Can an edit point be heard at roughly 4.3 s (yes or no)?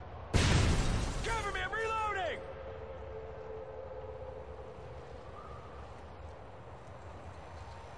no